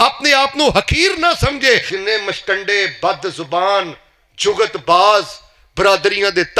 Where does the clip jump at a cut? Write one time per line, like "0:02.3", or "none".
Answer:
0:01.9